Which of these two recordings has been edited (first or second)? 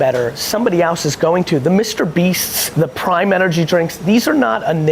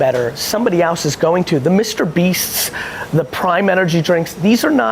first